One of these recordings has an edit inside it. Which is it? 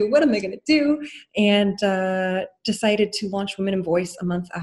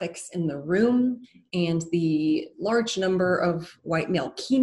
first; 1 cut; at 1.2 s

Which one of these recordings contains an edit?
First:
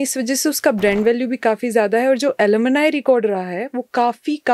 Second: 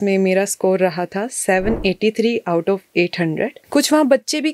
second; 1 cut; at 3.6 s

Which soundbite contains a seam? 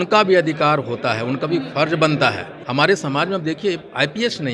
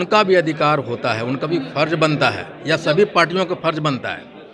first; 1 cut; at 2.5 s

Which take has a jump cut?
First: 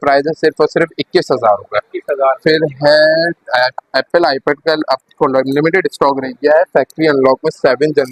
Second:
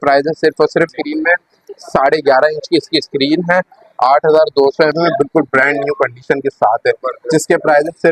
second; 2 cuts; at 0.9 s, 4.9 s

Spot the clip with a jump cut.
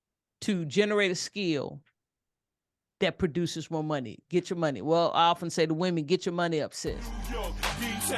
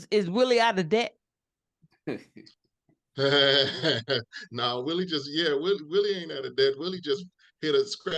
first; 1 cut; at 7.1 s

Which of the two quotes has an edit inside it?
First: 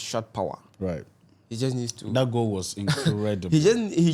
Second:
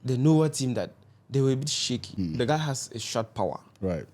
second; 1 cut; at 2.1 s

